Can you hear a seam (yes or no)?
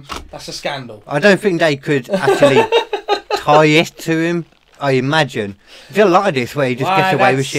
no